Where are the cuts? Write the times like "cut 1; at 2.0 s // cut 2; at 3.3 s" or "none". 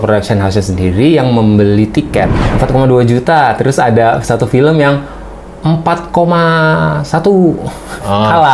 cut 1; at 2.4 s